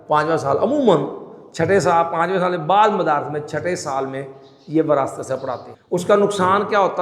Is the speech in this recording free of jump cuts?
no; 1 cut; at 5.7 s

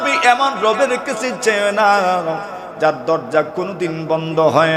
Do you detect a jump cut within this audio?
no; 0 cuts

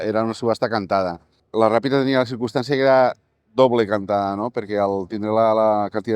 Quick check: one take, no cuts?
yes; 0 cuts

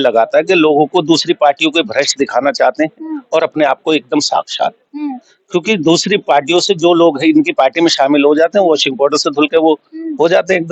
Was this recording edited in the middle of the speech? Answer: no; 0 cuts

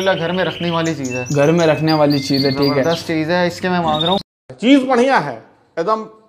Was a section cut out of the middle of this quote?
yes; 1 cut; at 4.2 s

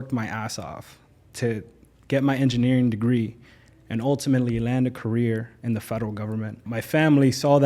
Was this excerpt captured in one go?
no; 1 cut; at 6.6 s

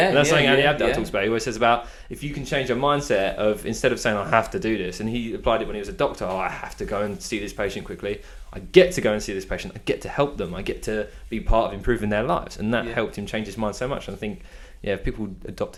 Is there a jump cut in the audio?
no; 0 cuts

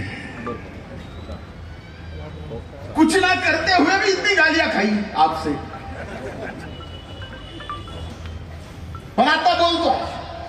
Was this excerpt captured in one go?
no; 1 cut; at 8.1 s

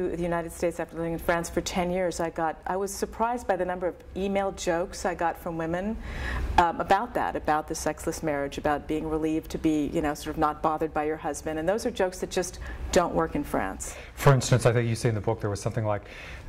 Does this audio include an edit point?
no; 0 cuts

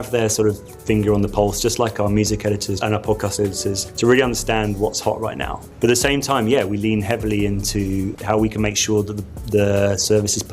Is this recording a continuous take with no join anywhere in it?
no; 4 cuts; at 2.8 s, 3.9 s, 5.6 s, 8.2 s

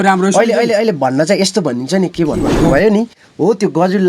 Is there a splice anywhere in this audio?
yes; 1 cut; at 2.5 s

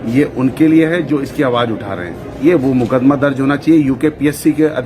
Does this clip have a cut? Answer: yes; 1 cut; at 2.4 s

